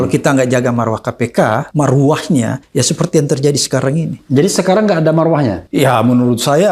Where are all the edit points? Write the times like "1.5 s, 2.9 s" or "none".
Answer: 1.7 s, 2.6 s, 4.2 s, 5.6 s